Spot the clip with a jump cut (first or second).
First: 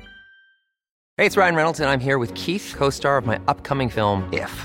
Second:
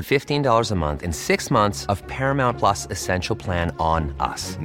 first